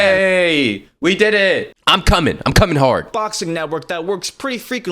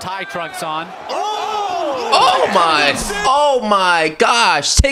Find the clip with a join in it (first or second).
first